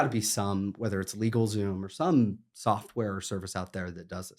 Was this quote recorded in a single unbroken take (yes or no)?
yes